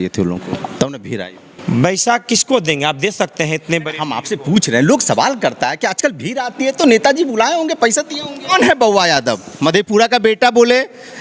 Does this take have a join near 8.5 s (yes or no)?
yes